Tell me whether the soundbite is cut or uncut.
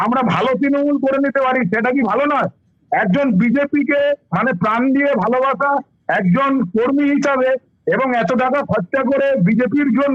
uncut